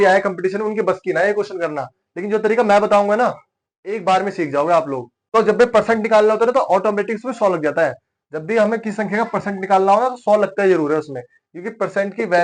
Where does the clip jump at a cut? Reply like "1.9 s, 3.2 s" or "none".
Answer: 5.1 s